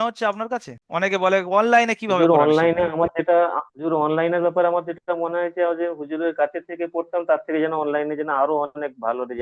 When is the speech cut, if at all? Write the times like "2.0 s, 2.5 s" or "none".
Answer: none